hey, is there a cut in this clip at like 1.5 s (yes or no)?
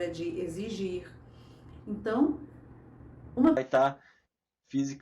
no